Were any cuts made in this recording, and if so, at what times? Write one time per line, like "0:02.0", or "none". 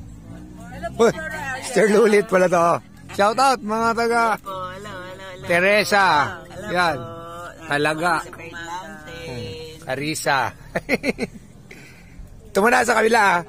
none